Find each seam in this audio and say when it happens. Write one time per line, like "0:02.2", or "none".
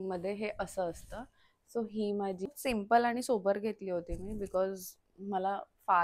0:02.5